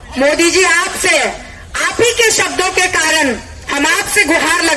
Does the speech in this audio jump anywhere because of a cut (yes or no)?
no